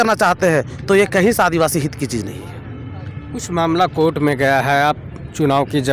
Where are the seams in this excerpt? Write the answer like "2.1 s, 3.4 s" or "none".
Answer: none